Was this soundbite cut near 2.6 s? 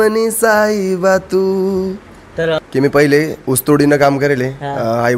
yes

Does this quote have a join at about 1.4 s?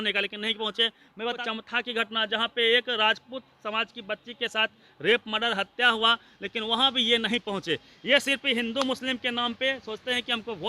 yes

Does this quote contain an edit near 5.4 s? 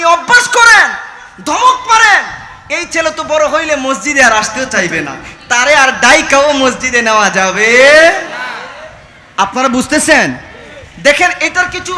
no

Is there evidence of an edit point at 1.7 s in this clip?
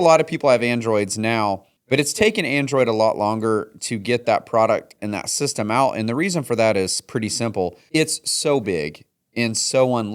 yes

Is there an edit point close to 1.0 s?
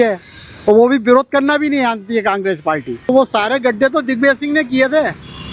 no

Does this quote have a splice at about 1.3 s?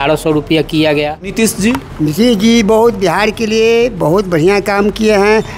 yes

